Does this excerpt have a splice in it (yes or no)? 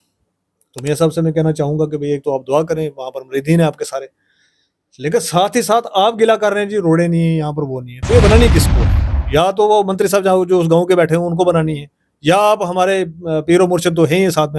no